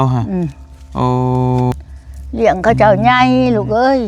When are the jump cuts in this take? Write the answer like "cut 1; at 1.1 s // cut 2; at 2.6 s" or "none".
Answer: cut 1; at 1.7 s